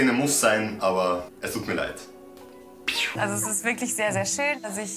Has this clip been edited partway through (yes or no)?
no